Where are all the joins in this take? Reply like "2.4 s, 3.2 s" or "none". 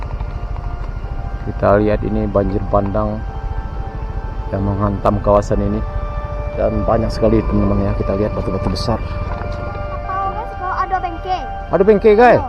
10.0 s